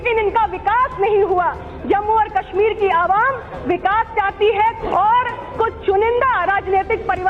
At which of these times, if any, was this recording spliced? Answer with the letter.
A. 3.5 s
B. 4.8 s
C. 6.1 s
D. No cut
B